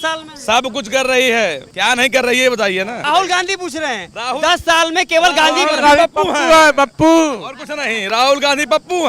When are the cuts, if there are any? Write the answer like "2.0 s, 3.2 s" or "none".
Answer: none

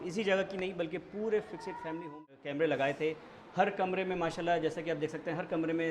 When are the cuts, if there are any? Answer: 2.1 s

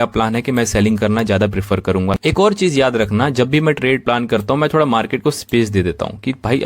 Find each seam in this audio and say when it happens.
2.2 s

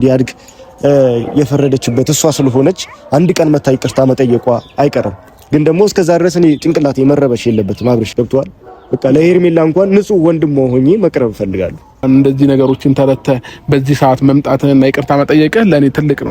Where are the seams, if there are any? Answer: 8.1 s, 12.0 s

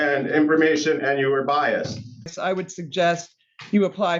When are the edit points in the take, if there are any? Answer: 2.3 s

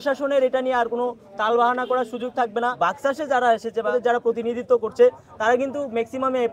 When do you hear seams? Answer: 2.7 s

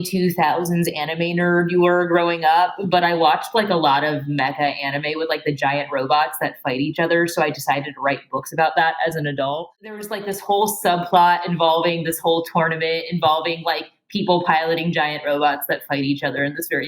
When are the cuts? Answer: 10.0 s

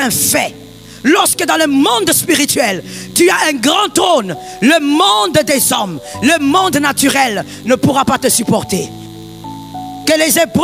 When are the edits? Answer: 9.3 s

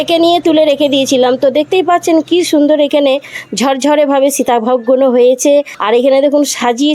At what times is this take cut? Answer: 5.8 s

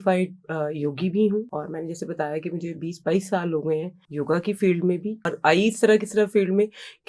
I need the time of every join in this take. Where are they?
1.5 s, 4.0 s, 5.3 s

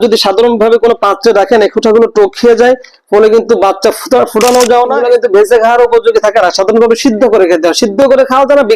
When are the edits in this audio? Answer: 5.0 s

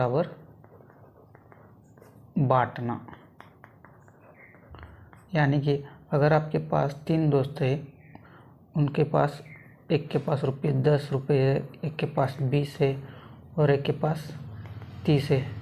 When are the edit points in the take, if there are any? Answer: none

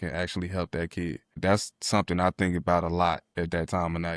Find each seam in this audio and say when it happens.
1.4 s, 3.3 s

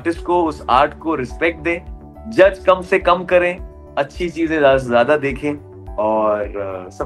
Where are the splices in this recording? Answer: none

